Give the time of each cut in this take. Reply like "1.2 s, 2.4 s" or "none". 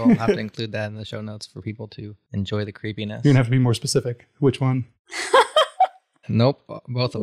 2.1 s